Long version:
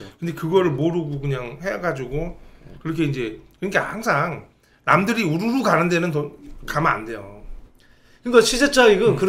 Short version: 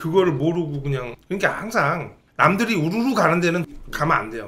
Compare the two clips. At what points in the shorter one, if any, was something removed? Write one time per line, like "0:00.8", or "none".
0:01.1
0:02.2
0:03.6